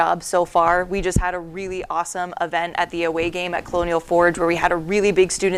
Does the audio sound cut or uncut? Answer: uncut